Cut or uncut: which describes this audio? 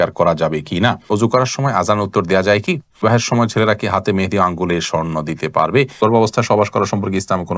cut